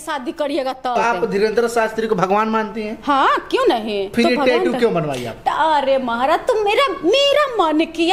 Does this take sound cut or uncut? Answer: cut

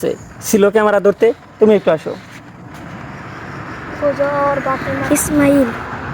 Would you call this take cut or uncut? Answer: cut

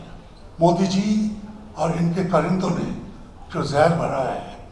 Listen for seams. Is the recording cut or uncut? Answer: uncut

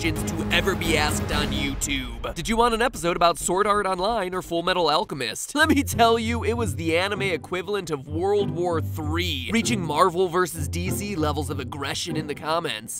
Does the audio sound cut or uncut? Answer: cut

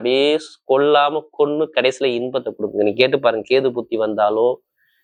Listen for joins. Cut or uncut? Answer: uncut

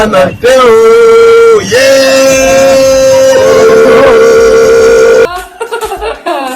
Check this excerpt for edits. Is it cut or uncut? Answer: cut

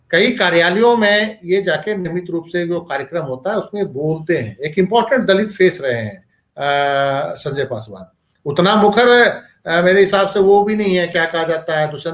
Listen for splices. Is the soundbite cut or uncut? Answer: uncut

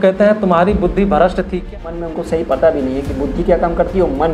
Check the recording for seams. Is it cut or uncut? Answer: cut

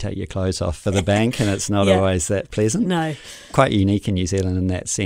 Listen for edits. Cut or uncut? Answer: cut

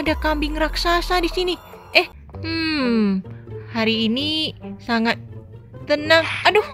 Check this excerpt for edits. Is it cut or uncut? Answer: cut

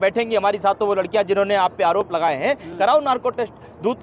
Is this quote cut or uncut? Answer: uncut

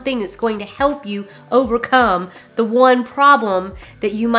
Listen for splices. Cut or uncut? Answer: uncut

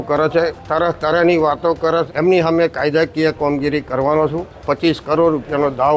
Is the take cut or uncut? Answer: cut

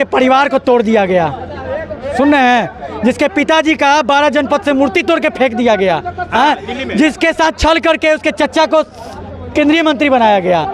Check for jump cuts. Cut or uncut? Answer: uncut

